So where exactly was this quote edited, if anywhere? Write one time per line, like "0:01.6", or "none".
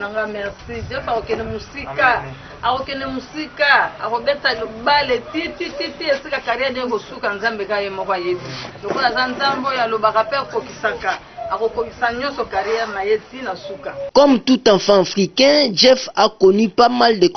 0:14.1